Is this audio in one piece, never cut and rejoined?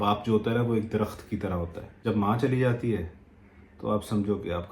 no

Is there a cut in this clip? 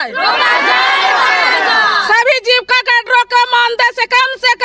no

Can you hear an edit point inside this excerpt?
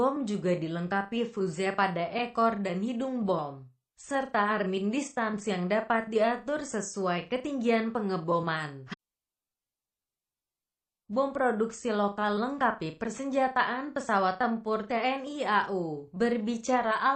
no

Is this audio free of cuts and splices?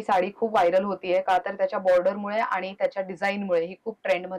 yes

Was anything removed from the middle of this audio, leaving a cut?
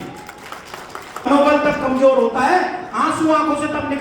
yes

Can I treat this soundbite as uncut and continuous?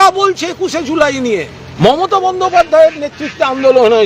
no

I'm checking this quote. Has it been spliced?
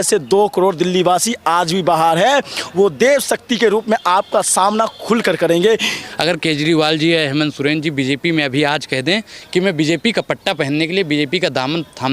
yes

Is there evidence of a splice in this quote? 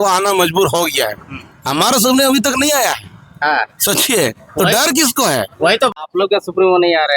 yes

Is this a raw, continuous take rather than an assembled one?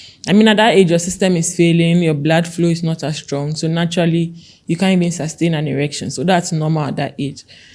yes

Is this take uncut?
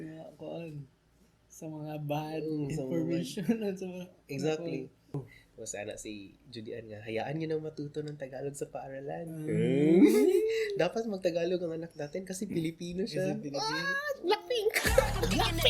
no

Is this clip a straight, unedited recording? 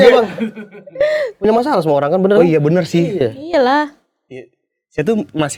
yes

